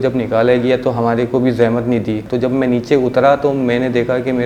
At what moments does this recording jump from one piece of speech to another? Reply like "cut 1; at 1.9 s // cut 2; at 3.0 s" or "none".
cut 1; at 2.2 s

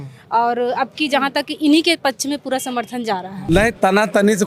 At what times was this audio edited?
cut 1; at 3.3 s

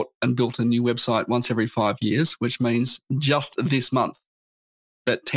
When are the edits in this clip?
none

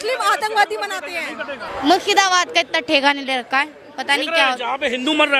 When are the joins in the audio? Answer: cut 1; at 1.7 s

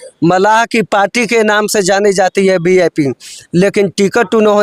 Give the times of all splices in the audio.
none

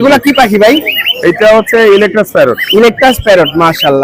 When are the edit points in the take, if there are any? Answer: none

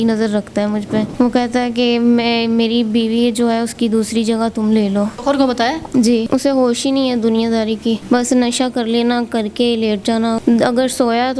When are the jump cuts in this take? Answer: cut 1; at 1.1 s // cut 2; at 5.2 s // cut 3; at 6.3 s // cut 4; at 8.0 s // cut 5; at 10.4 s

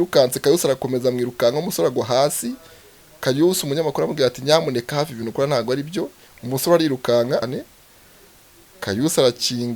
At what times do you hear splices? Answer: cut 1; at 7.5 s

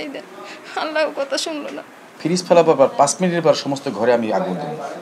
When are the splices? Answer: cut 1; at 2.1 s

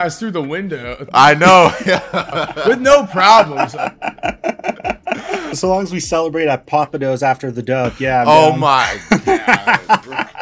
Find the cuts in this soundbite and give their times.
cut 1; at 5.5 s

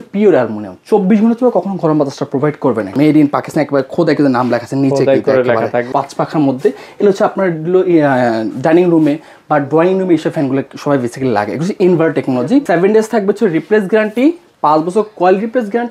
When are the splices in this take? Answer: cut 1; at 2.9 s // cut 2; at 5.9 s // cut 3; at 12.7 s

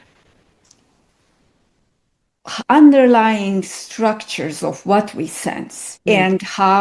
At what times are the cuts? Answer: none

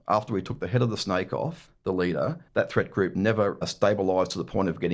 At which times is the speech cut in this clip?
cut 1; at 1.7 s // cut 2; at 2.4 s // cut 3; at 3.7 s

